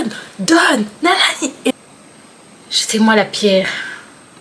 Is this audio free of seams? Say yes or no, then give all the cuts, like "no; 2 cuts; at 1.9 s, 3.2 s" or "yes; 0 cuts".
no; 1 cut; at 1.7 s